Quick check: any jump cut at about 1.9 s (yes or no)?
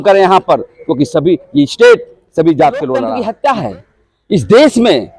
no